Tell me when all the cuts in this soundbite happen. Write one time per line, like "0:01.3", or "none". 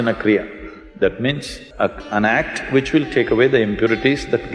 0:01.6